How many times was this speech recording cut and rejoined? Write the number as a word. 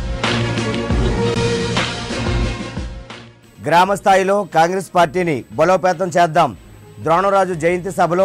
one